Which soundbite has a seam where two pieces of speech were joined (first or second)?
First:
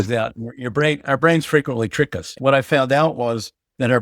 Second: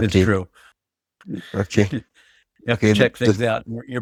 first